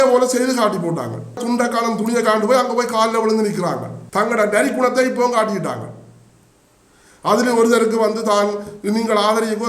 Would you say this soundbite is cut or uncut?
cut